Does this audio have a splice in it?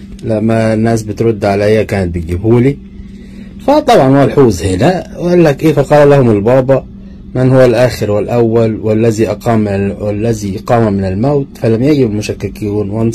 no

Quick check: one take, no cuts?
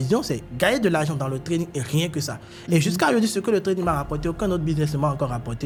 yes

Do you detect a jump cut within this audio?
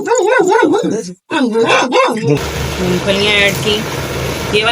yes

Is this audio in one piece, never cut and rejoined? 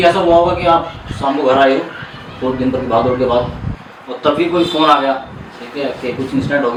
yes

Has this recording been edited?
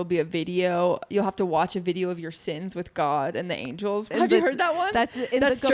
yes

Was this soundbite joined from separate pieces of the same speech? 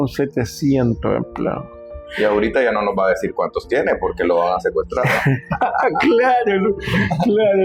no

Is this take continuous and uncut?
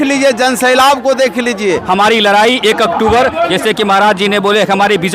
no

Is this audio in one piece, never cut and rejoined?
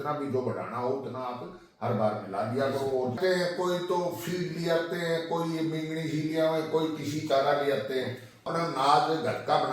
no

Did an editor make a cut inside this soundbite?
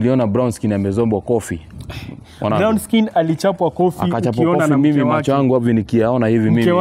no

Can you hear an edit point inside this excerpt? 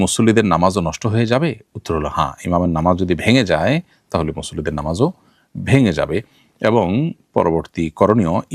no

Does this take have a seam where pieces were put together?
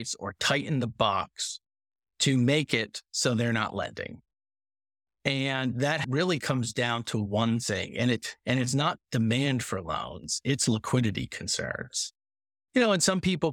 yes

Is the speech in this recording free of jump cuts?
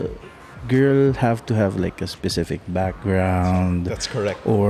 yes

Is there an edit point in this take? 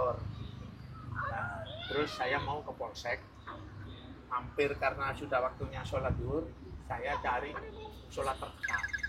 no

